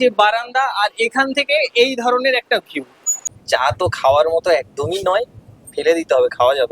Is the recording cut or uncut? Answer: cut